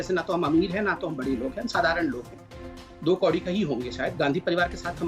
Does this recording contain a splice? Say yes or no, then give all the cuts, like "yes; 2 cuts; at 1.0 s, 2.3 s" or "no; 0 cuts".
no; 0 cuts